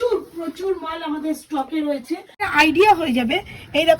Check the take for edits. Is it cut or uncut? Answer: cut